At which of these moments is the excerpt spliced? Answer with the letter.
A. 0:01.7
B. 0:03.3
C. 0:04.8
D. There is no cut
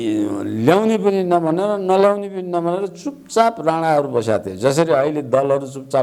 D